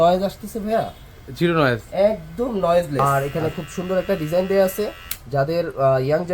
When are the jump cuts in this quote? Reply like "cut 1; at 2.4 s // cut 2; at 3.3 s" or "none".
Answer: cut 1; at 3.0 s